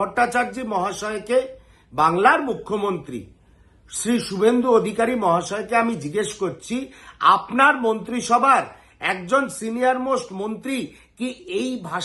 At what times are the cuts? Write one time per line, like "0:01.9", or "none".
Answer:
none